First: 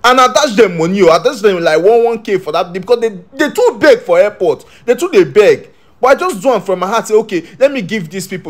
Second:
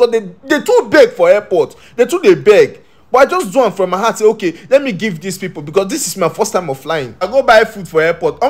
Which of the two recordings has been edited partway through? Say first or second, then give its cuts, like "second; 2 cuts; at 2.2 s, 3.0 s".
second; 1 cut; at 7.3 s